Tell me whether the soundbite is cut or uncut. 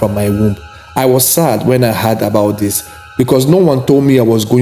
uncut